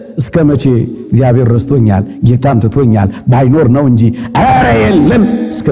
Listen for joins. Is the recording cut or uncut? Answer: uncut